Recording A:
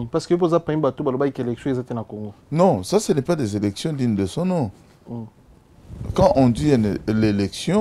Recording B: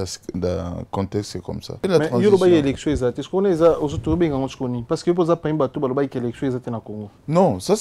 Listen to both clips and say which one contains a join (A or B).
B